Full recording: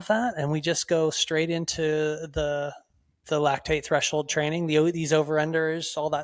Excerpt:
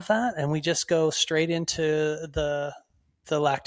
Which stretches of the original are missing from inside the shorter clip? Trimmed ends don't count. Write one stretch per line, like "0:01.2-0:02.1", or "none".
none